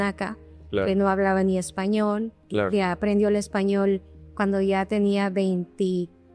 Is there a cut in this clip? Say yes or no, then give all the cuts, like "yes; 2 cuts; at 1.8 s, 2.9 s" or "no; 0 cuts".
no; 0 cuts